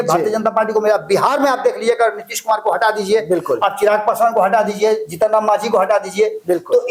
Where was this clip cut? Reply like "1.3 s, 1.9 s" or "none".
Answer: none